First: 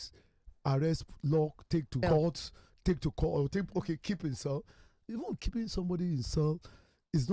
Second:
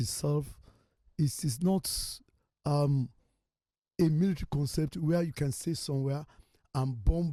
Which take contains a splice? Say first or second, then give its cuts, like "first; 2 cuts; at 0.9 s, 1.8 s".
first; 1 cut; at 2.0 s